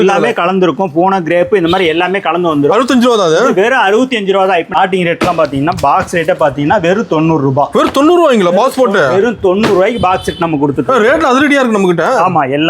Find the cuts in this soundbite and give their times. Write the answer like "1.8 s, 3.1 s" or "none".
4.8 s